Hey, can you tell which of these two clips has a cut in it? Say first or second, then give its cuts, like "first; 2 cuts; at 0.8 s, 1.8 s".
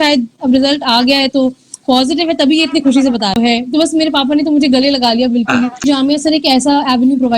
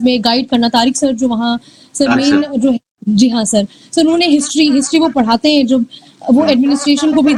first; 2 cuts; at 3.4 s, 5.8 s